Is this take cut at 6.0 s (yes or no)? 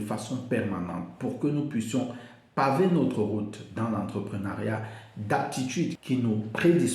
yes